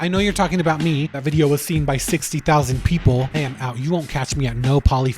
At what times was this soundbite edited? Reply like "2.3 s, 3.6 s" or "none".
1.1 s, 3.3 s